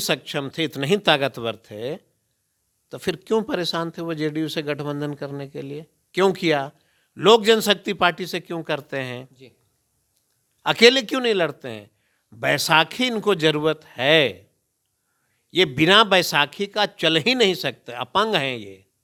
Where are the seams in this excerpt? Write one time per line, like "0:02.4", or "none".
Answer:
none